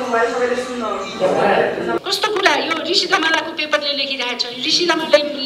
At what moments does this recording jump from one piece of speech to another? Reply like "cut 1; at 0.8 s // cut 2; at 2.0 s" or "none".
cut 1; at 2.0 s